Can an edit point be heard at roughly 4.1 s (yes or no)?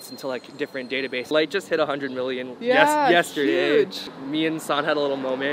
yes